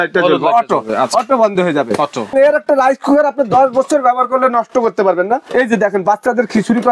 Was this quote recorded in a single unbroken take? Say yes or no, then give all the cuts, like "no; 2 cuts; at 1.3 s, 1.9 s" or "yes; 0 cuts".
no; 2 cuts; at 2.3 s, 5.5 s